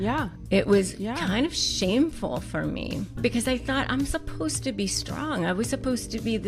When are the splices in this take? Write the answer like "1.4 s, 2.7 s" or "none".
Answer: 3.2 s

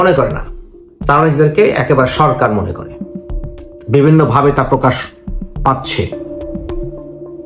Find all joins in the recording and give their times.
6.5 s

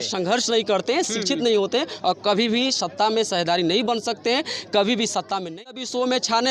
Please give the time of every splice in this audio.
5.5 s

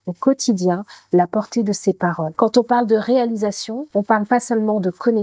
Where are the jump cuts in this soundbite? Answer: 2.3 s, 3.7 s

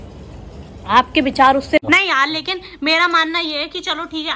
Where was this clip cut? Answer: 1.8 s

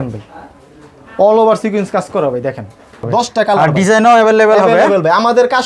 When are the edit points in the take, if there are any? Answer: 3.1 s

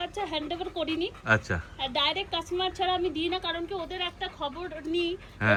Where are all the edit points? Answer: none

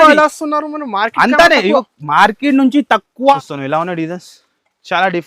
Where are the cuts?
3.3 s

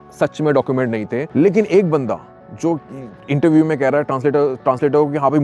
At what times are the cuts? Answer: 1.3 s

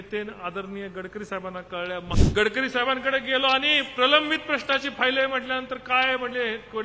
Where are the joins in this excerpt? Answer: 2.1 s

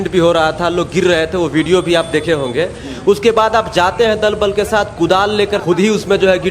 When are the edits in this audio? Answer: 5.6 s

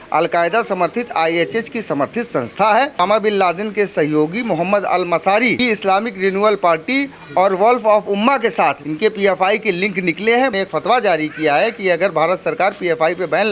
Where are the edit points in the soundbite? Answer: 3.0 s, 5.6 s, 8.9 s, 10.5 s

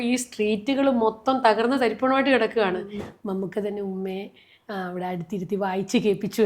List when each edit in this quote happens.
2.9 s

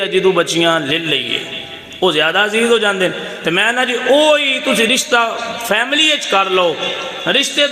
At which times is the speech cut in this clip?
none

